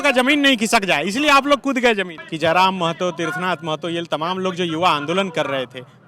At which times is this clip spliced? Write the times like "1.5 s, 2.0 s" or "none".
2.2 s

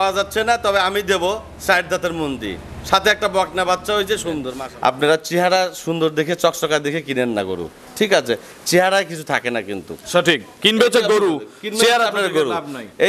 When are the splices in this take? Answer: 4.5 s

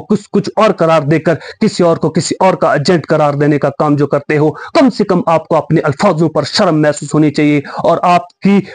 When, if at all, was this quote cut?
none

